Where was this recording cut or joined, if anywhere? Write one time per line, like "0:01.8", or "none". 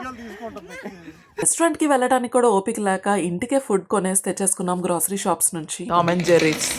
0:01.5
0:05.8

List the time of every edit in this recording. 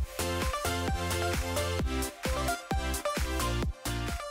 none

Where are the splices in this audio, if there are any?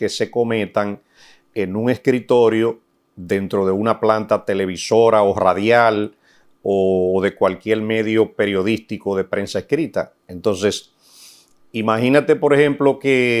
none

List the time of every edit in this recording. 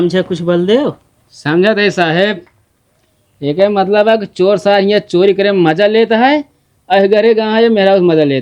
none

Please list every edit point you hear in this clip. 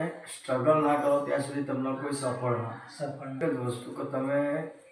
0:03.4

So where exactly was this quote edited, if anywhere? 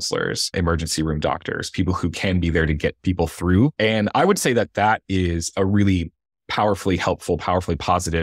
none

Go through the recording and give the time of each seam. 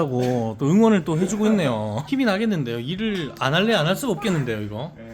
none

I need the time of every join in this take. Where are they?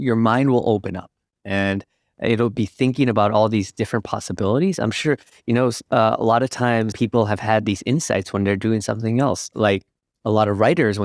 0:06.9

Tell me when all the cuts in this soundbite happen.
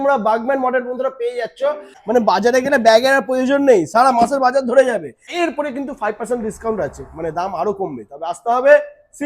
0:01.9
0:05.2

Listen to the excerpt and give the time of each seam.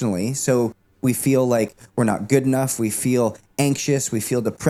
none

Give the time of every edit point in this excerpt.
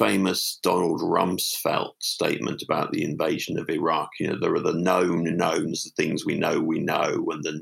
none

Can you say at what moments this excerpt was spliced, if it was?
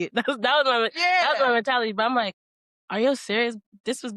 none

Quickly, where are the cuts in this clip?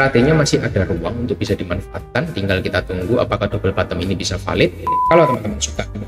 0:04.9

